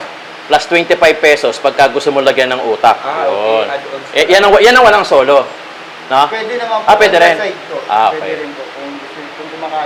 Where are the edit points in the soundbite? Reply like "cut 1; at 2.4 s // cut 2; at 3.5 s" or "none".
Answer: none